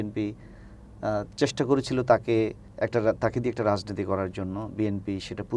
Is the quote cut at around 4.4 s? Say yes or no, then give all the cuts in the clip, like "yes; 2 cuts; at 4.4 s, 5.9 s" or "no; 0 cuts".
no; 1 cut; at 2.6 s